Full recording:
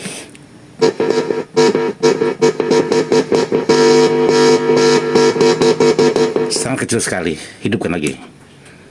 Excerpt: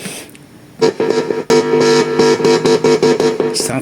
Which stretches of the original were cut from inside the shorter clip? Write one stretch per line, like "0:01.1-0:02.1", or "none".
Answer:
0:01.5-0:04.5